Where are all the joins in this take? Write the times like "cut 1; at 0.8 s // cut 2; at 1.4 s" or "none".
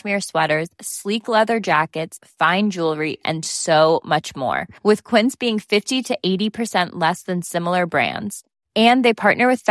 none